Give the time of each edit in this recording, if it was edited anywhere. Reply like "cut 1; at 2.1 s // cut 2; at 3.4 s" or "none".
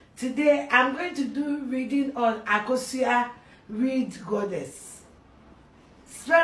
none